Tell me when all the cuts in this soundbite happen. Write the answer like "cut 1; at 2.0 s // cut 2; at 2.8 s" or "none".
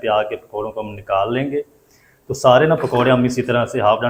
none